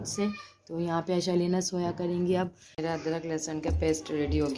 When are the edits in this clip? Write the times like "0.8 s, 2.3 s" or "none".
2.6 s